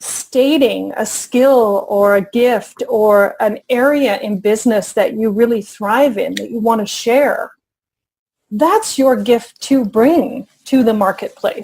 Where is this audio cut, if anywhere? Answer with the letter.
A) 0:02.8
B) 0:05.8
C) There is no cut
C